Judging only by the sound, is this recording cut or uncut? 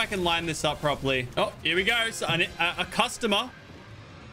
cut